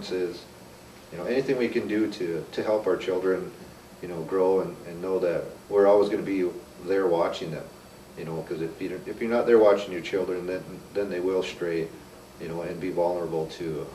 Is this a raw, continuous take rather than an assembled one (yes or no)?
no